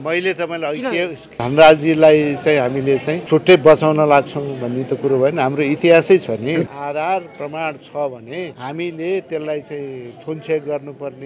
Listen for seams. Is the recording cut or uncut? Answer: cut